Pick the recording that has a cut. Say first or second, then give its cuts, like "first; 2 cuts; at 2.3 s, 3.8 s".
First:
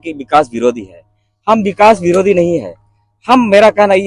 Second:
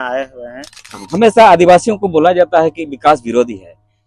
second; 1 cut; at 1.0 s